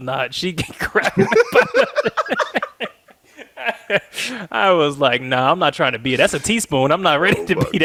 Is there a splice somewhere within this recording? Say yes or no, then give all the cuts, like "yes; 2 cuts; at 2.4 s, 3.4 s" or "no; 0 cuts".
no; 0 cuts